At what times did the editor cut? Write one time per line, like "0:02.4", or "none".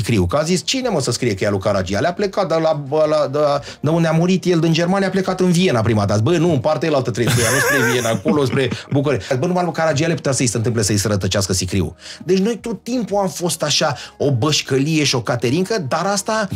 0:09.3